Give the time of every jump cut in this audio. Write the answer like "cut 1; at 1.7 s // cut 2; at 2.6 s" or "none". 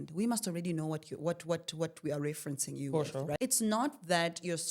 cut 1; at 3.4 s